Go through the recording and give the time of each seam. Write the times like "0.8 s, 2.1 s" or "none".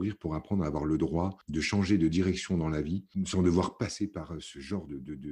1.4 s, 3.1 s

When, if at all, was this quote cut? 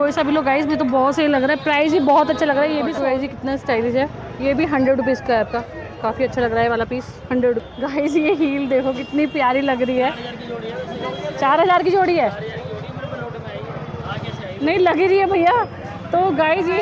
2.5 s, 7.7 s

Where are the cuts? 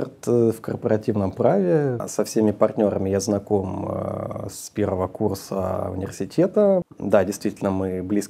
2.0 s, 6.8 s

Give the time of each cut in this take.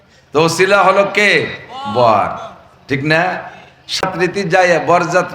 4.0 s

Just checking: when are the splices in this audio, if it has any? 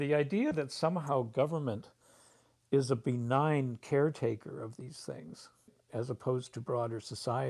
5.8 s

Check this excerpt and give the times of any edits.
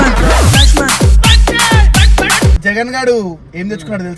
2.6 s

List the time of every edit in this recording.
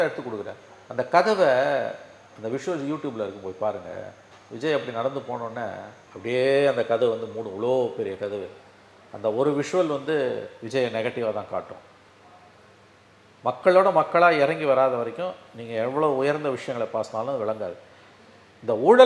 none

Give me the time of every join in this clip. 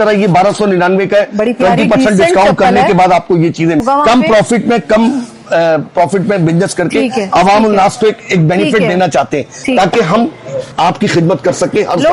3.8 s, 10.6 s

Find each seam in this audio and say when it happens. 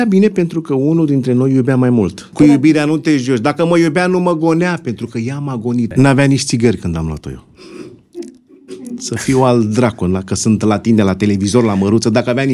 2.2 s, 5.9 s

